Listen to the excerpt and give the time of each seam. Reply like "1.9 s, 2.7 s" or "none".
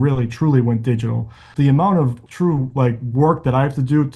1.5 s, 2.2 s